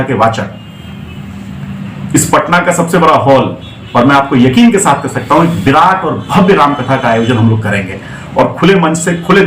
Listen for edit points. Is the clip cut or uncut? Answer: uncut